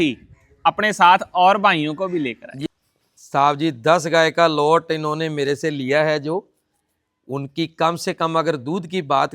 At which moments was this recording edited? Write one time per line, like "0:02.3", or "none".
0:02.7

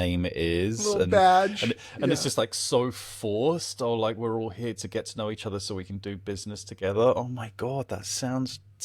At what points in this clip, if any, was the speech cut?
none

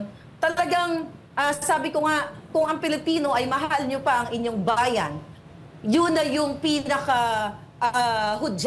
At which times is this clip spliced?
none

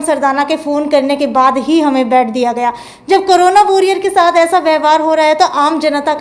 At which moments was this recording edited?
none

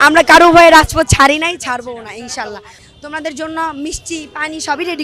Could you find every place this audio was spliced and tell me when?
none

